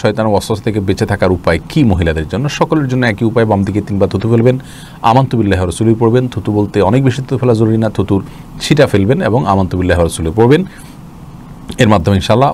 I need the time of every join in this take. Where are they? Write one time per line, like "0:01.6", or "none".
none